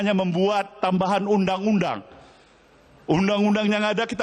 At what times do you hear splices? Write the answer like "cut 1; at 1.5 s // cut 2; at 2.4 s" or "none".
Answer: none